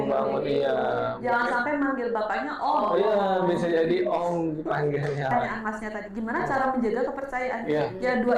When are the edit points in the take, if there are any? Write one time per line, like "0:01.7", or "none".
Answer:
0:05.3